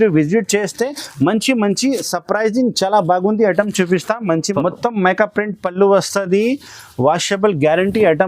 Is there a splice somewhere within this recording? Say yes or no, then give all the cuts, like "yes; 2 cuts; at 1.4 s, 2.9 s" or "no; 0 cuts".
yes; 1 cut; at 4.5 s